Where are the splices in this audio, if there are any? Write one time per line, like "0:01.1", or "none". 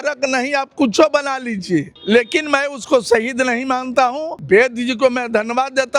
0:01.9
0:04.3